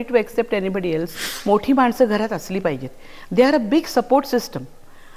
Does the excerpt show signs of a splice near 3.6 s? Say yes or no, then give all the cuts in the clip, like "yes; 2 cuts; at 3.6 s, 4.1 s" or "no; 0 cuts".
no; 1 cut; at 1.3 s